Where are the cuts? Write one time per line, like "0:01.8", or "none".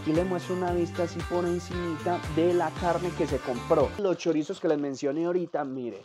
0:04.0